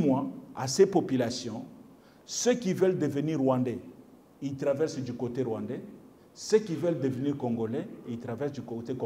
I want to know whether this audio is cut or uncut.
uncut